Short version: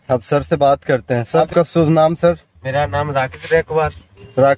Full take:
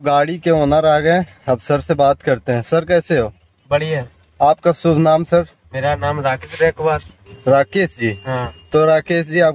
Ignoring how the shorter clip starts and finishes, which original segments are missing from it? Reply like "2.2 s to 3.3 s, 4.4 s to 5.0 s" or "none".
2.8 s to 4.5 s